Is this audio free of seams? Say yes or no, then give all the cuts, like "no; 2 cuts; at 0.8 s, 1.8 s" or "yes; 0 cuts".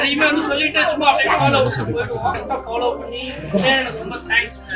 yes; 0 cuts